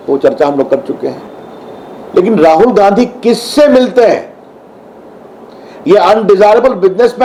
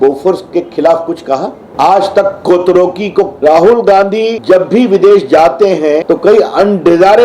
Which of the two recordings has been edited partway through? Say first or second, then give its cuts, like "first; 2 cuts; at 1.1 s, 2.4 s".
second; 4 cuts; at 1.6 s, 3.4 s, 4.4 s, 6.0 s